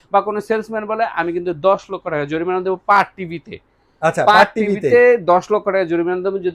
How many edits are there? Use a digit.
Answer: 0